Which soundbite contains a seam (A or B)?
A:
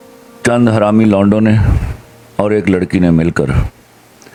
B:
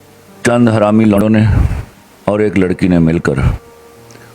B